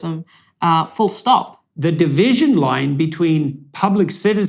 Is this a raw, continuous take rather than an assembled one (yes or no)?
no